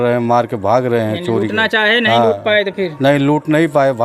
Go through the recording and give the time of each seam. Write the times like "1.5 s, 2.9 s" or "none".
none